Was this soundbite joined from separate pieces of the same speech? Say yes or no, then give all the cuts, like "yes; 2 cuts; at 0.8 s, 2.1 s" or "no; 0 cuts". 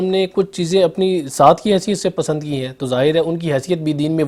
no; 0 cuts